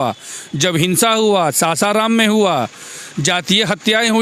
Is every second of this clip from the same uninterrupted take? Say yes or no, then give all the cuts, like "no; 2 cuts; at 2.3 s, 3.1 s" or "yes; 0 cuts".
yes; 0 cuts